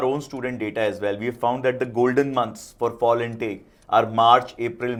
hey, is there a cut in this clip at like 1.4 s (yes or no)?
no